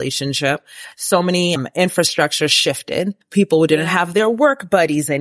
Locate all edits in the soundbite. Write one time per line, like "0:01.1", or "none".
0:01.6
0:03.2